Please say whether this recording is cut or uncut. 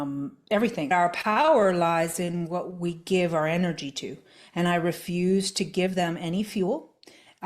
cut